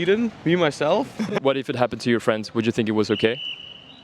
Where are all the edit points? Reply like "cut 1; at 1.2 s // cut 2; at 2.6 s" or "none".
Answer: cut 1; at 1.4 s